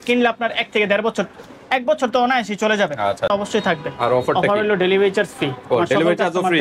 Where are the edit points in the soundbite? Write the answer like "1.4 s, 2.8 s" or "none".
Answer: 3.3 s

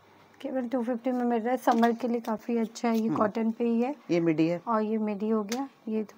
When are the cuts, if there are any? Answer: none

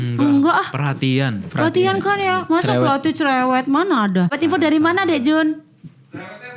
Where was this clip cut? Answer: 4.3 s

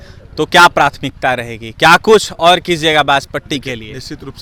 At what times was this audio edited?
none

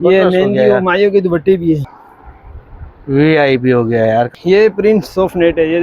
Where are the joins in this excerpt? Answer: 1.9 s, 4.3 s

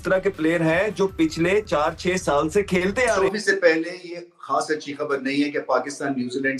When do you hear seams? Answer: 3.2 s

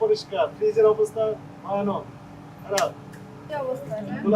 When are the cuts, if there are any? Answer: 3.3 s

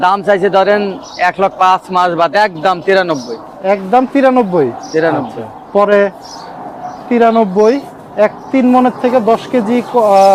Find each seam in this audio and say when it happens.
none

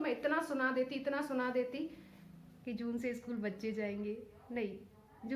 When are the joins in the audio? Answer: 2.5 s

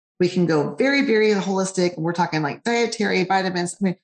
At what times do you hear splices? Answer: none

